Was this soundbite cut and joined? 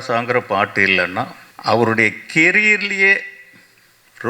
yes; 1 cut; at 1.4 s

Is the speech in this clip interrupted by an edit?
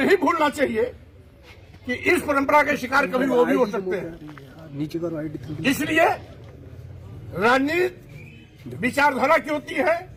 no; 0 cuts

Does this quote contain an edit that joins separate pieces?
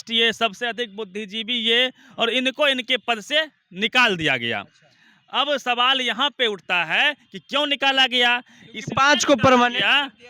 no; 0 cuts

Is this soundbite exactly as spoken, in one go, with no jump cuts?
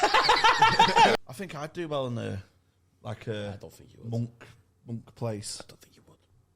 no; 1 cut; at 1.1 s

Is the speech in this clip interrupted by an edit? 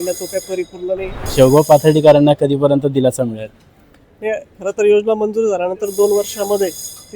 yes; 1 cut; at 1.2 s

